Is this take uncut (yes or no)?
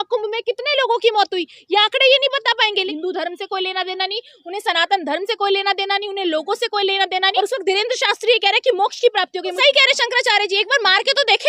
no